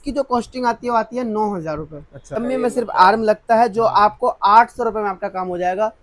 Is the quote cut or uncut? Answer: cut